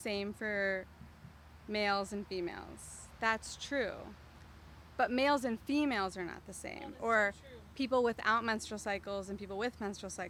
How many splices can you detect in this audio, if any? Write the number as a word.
zero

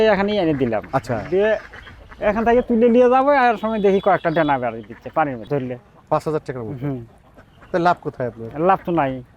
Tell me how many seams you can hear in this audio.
one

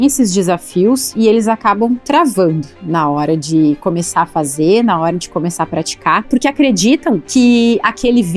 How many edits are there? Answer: two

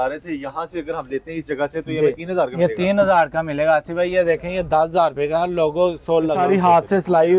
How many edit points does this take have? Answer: one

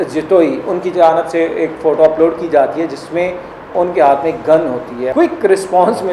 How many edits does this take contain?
one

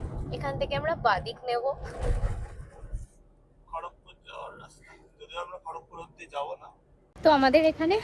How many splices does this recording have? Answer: one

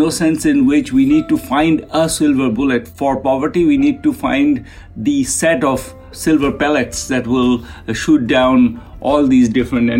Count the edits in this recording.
two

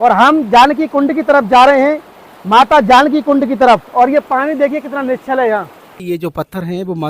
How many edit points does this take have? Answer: one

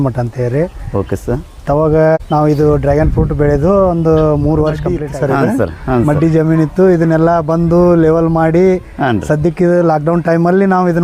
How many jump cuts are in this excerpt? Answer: two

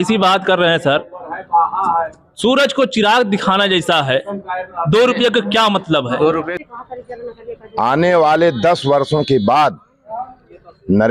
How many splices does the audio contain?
one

